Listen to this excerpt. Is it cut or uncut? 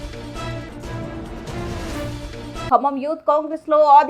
uncut